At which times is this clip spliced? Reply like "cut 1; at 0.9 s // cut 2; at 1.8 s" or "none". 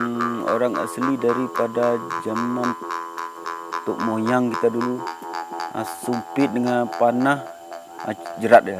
cut 1; at 6.5 s